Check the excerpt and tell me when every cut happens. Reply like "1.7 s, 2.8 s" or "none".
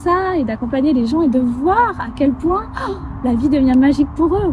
none